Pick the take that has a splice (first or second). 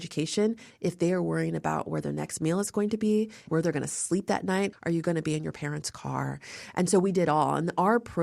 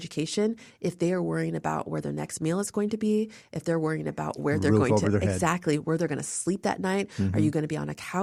first